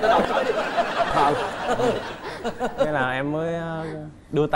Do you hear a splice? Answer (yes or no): no